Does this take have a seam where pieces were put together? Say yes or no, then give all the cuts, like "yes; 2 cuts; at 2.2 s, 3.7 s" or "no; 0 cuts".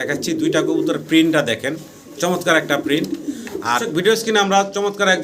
yes; 1 cut; at 3.8 s